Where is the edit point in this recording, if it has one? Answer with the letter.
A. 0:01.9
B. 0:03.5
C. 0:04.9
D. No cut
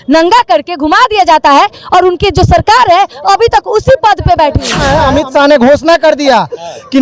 C